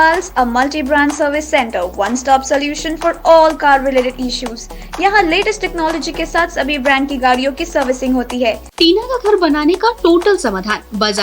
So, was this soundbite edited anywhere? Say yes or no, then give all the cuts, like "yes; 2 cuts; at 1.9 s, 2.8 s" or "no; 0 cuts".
yes; 1 cut; at 8.7 s